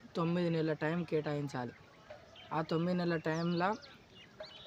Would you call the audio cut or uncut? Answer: uncut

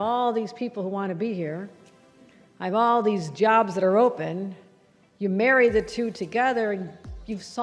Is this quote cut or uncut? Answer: uncut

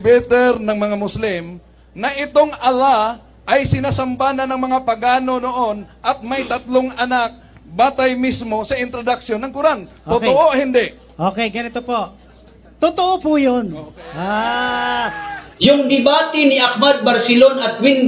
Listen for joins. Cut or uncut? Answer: cut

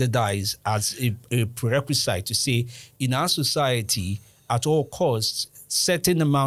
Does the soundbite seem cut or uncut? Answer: uncut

